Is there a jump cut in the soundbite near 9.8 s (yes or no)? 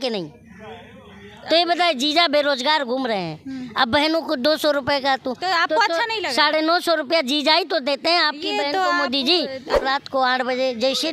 yes